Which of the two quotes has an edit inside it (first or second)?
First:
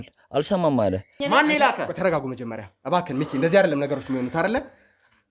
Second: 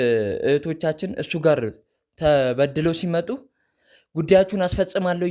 first